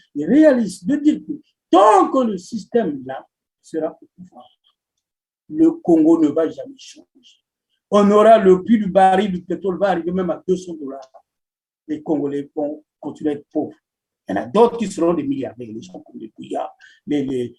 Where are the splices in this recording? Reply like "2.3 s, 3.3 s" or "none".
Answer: none